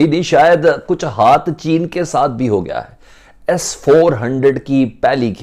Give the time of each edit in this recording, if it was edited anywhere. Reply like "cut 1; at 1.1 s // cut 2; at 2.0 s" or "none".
none